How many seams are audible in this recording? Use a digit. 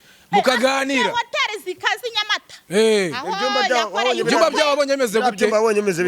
0